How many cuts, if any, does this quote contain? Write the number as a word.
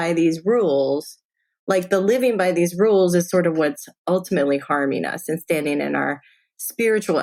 zero